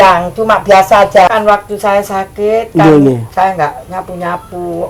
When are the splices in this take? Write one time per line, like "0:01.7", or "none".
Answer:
0:01.3